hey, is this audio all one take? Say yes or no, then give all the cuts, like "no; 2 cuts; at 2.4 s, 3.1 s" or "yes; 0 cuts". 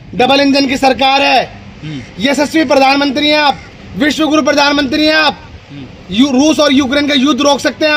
yes; 0 cuts